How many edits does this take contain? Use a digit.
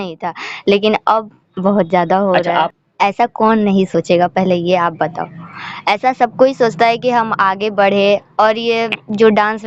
1